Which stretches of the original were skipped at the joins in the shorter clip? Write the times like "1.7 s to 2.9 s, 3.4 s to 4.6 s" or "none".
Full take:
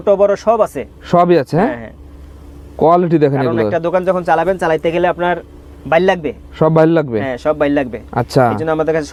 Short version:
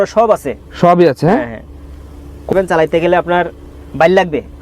2.8 s to 4.4 s

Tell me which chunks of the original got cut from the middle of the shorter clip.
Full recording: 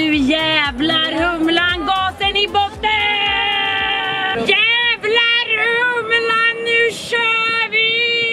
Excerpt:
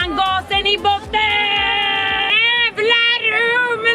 4.0 s to 4.6 s

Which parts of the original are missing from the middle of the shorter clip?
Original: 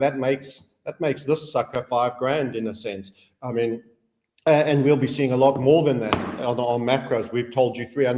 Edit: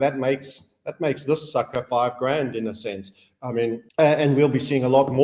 3.8 s to 4.3 s

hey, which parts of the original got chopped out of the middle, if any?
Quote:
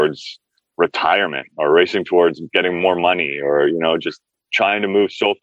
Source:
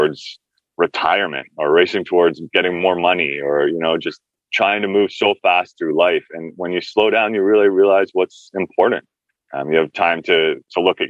none

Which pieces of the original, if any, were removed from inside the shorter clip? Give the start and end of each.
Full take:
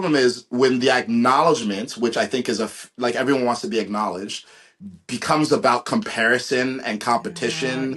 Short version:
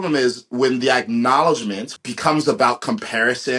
1.9 s to 4.9 s

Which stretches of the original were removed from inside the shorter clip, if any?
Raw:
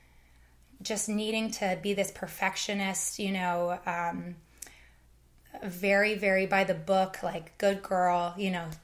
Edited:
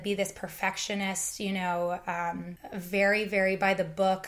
4.4 s to 5.5 s

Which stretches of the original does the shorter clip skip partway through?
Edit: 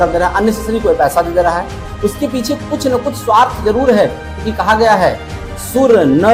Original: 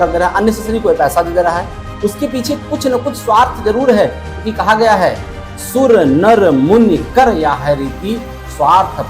none

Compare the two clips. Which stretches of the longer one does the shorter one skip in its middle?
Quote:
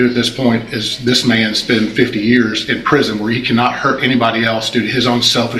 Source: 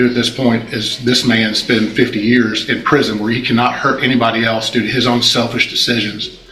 none

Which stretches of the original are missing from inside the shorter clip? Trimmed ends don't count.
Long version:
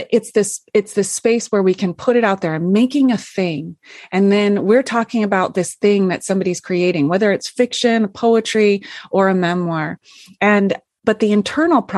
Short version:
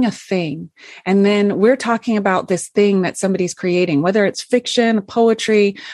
none

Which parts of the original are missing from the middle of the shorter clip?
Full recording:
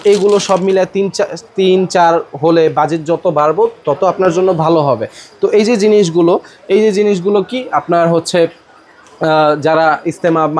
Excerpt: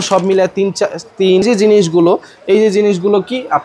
1.8 s to 5.6 s

